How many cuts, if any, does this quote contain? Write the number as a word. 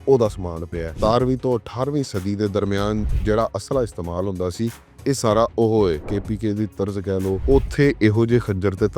three